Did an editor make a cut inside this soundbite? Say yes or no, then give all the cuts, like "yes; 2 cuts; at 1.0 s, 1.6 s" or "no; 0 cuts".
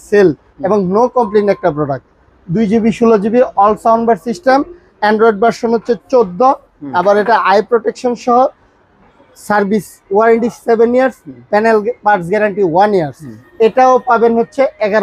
no; 0 cuts